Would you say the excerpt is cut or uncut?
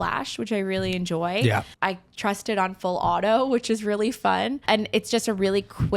cut